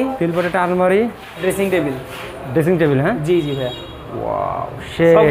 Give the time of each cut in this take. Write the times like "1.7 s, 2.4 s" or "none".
1.4 s